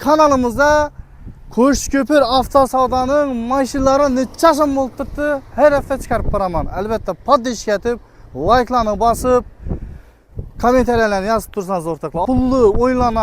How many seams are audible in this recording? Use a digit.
1